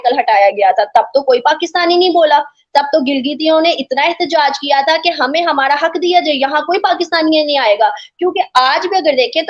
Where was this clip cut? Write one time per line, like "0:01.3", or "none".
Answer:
none